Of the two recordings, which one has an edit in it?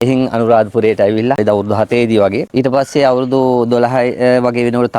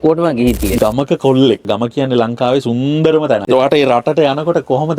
second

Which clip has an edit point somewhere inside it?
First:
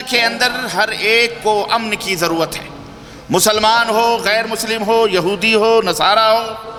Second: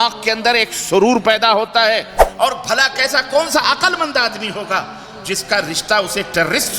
second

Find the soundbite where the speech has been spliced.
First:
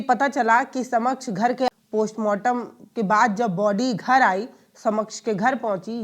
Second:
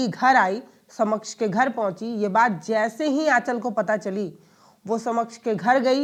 first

